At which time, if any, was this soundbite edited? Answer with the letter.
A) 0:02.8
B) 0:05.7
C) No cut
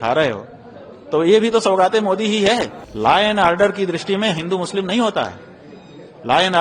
A